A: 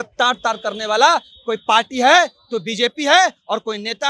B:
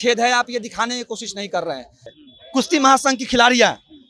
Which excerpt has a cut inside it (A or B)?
B